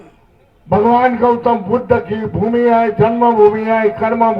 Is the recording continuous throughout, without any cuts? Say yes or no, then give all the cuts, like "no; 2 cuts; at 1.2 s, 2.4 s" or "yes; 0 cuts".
yes; 0 cuts